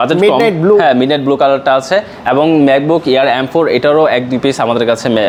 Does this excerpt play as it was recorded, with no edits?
yes; 0 cuts

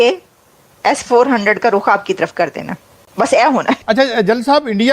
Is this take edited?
yes; 1 cut; at 3.8 s

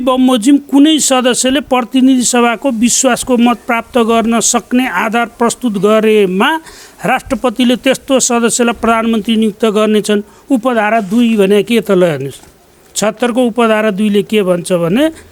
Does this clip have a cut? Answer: no; 0 cuts

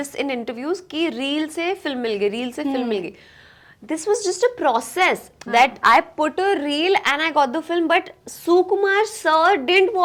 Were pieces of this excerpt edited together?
no; 0 cuts

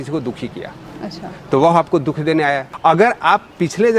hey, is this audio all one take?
no; 1 cut; at 2.7 s

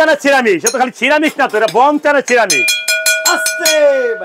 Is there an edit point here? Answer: no; 0 cuts

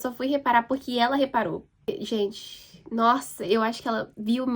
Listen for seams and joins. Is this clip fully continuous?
no; 1 cut; at 1.9 s

